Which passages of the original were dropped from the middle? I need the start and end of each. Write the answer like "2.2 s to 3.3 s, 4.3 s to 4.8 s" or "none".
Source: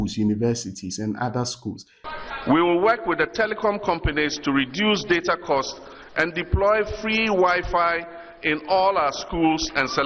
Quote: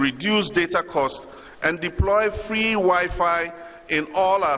none